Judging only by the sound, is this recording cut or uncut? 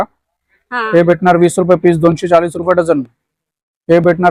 uncut